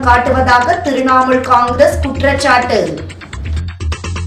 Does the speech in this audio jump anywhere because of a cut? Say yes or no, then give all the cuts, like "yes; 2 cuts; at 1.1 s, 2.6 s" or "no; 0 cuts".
yes; 1 cut; at 3.1 s